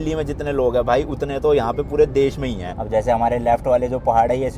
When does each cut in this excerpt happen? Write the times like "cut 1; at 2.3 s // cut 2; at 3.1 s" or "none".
cut 1; at 2.6 s